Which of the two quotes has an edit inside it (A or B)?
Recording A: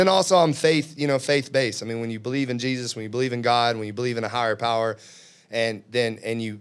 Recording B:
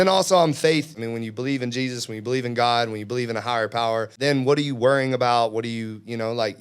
B